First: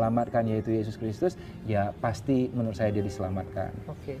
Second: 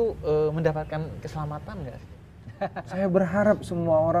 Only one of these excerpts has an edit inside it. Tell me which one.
second; 1 cut; at 2.4 s

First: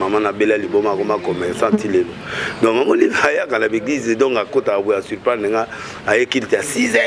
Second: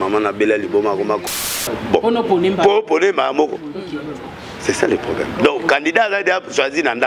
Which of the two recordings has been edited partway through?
second; 1 cut; at 1.2 s

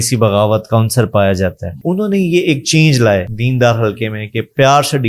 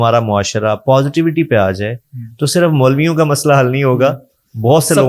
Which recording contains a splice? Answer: first; 2 cuts; at 1.8 s, 3.4 s

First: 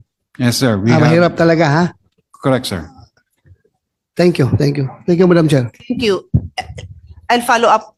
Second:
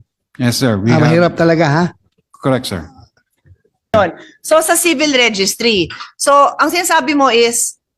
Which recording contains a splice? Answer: second; 1 cut; at 3.9 s

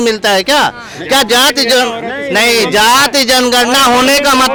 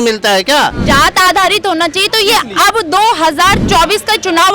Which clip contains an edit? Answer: second; 2 cuts; at 0.8 s, 3.6 s

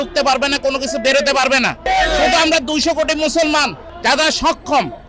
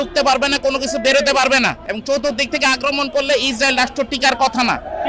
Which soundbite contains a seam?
first; 1 cut; at 1.9 s

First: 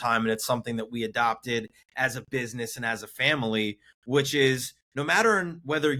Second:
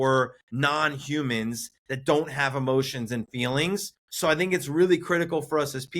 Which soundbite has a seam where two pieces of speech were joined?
second; 1 cut; at 4.0 s

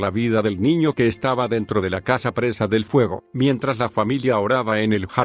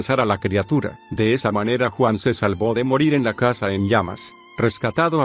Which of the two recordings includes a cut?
first; 1 cut; at 2.7 s

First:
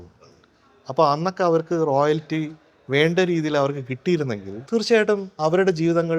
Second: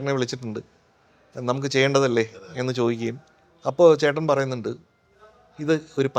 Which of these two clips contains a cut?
first; 2 cuts; at 4.5 s, 5.3 s

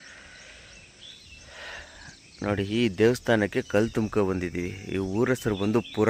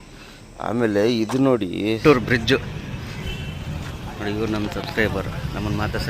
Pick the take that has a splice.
second; 1 cut; at 2.0 s

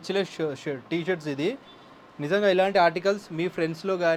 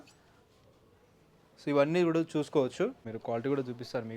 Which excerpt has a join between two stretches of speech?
second; 1 cut; at 3.1 s

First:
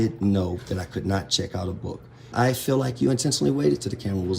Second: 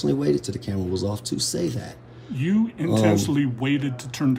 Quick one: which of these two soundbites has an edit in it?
first; 1 cut; at 2.3 s

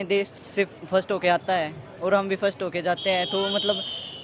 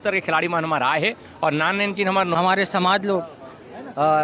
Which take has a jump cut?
second; 1 cut; at 2.3 s

